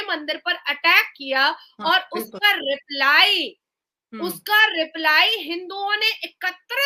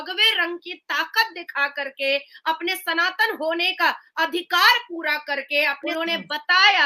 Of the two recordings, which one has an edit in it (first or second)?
second